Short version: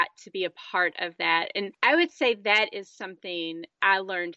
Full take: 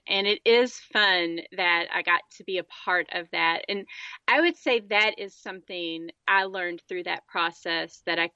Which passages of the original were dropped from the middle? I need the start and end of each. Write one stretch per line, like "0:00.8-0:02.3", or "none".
0:03.9-0:04.2